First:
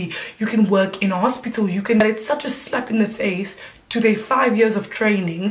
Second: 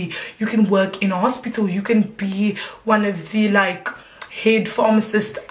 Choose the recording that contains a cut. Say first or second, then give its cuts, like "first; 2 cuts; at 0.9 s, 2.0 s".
first; 1 cut; at 2.0 s